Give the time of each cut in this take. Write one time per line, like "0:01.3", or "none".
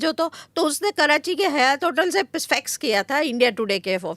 none